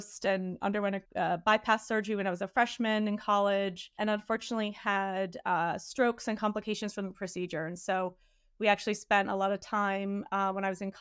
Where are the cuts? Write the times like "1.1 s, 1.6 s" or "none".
1.0 s, 3.9 s

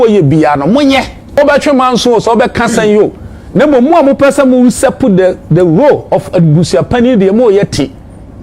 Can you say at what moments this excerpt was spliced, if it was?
1.4 s

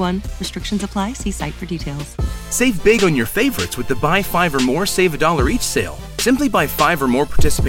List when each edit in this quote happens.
none

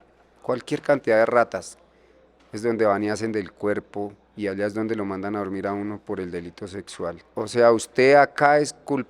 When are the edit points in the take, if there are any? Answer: 7.2 s

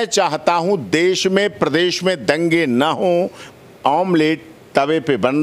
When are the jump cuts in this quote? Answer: 3.4 s

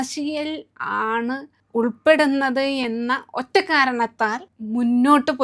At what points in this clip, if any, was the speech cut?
1.5 s, 4.5 s

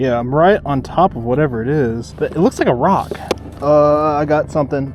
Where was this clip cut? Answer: 2.1 s, 3.4 s

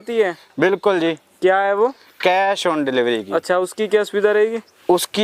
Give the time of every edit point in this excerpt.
none

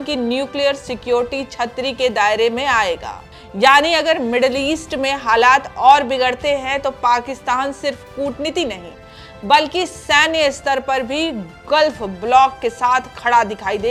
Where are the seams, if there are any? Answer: none

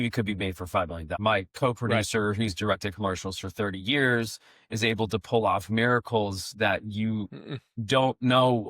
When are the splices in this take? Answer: 1.1 s

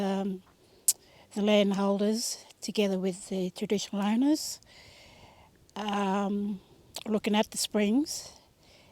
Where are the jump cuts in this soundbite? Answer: none

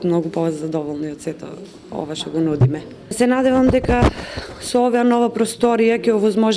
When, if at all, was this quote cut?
3.1 s

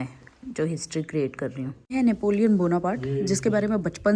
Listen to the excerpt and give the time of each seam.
1.8 s

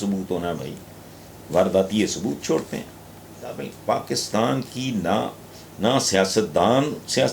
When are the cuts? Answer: 3.6 s

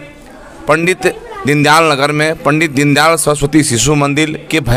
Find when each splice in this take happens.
none

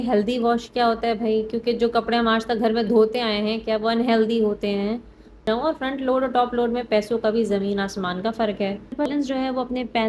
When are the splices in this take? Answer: 5.4 s, 9.1 s

